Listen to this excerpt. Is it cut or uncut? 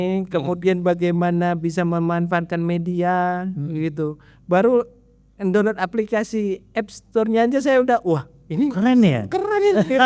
uncut